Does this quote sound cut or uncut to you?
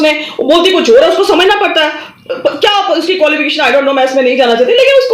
uncut